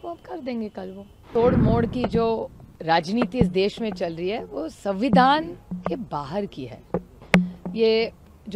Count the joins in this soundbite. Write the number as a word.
one